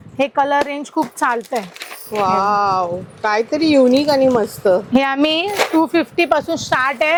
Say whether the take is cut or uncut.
uncut